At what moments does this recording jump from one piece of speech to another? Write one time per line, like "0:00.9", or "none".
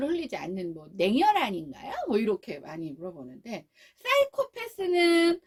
none